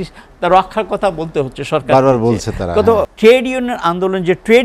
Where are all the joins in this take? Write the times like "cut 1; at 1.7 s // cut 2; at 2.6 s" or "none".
cut 1; at 3.1 s

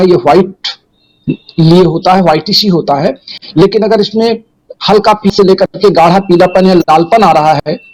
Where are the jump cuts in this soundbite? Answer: none

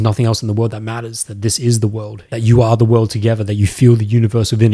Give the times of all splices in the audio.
none

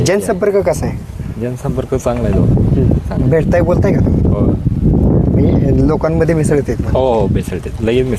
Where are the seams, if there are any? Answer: none

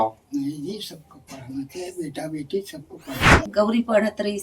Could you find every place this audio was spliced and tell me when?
cut 1; at 3.5 s

